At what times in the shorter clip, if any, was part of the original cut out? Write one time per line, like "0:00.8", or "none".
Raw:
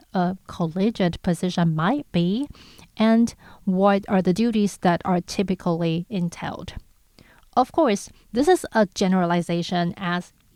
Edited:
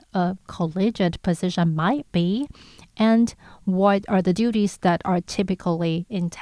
none

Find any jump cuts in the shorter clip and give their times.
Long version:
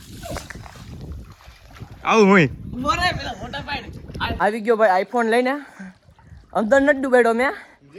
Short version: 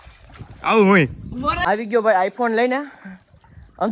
0:01.6

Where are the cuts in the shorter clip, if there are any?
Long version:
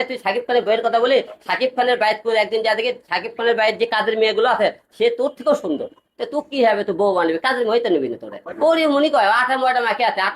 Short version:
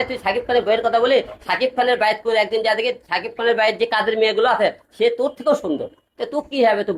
none

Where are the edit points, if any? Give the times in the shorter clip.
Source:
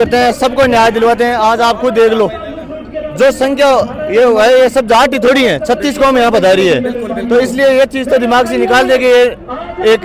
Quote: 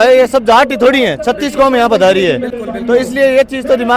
none

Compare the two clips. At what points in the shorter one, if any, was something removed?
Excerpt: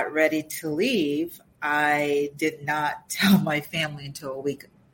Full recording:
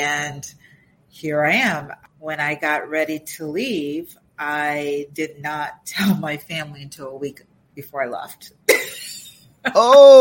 none

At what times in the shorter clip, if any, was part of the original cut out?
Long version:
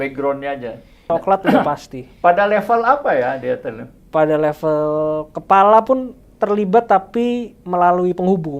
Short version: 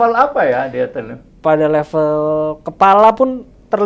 none

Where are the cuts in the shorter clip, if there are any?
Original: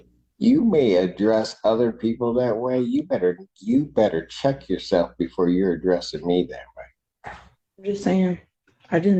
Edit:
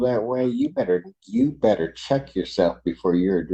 none

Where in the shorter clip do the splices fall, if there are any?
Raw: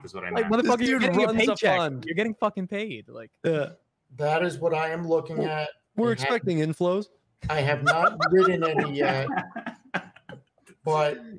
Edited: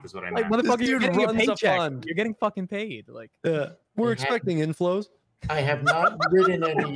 0:03.8

